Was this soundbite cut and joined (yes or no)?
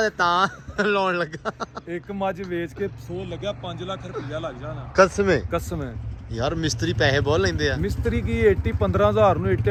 no